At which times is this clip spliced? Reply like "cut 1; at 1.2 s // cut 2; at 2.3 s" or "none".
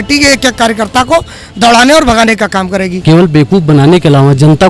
cut 1; at 2.9 s